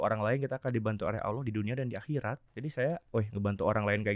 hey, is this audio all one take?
no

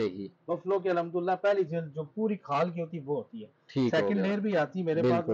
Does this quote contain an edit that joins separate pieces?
no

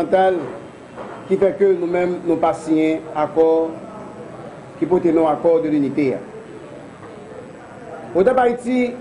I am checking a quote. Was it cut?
no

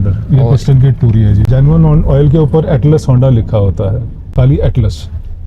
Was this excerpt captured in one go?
no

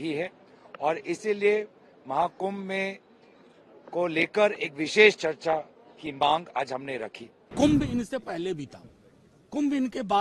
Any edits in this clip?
yes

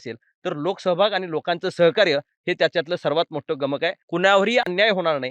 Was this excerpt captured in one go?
no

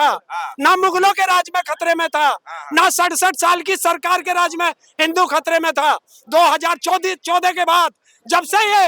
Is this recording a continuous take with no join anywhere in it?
yes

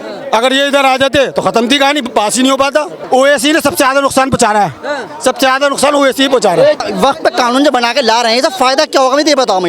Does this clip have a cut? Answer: yes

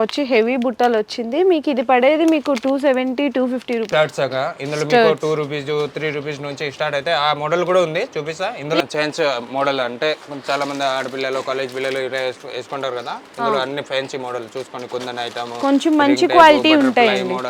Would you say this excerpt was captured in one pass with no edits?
no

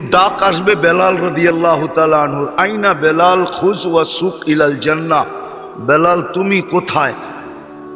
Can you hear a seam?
no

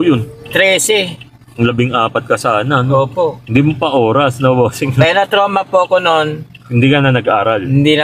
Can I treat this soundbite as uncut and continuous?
yes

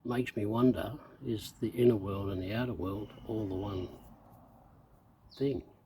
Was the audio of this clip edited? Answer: no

